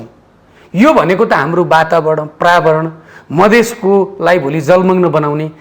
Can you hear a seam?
no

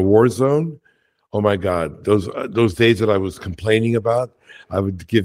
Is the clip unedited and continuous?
yes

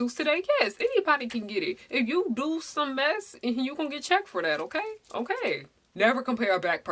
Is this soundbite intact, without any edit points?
no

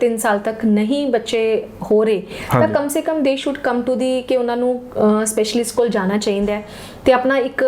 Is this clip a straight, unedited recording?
yes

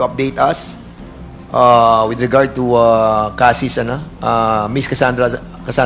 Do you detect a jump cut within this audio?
no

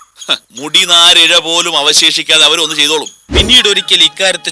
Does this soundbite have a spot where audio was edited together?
yes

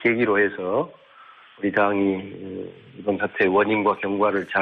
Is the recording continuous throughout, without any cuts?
no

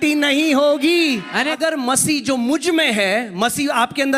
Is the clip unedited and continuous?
no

